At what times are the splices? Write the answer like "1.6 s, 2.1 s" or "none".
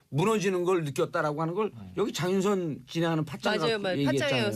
2.3 s